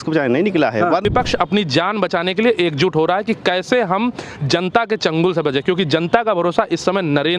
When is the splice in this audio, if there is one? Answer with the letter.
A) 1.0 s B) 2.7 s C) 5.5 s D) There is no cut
A